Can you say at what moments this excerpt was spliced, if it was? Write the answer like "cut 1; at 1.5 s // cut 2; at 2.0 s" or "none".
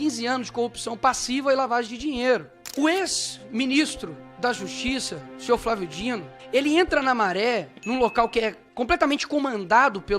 cut 1; at 2.6 s // cut 2; at 6.3 s // cut 3; at 8.6 s